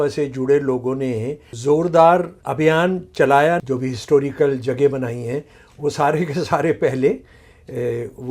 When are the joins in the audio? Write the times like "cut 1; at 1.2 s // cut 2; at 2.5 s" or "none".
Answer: cut 1; at 1.5 s // cut 2; at 2.4 s // cut 3; at 3.6 s